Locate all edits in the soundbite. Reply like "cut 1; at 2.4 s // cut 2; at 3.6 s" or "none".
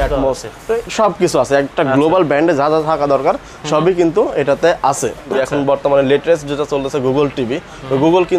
cut 1; at 5.3 s